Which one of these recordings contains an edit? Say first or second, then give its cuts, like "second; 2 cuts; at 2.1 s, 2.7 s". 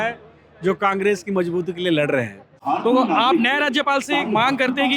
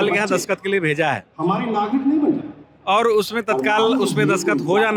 first; 1 cut; at 2.6 s